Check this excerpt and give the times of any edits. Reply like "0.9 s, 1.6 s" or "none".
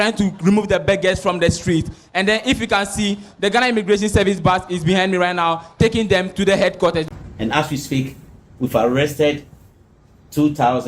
7.1 s